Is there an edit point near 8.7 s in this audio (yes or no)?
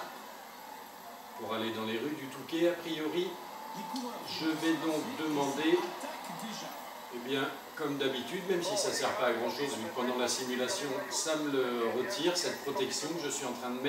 no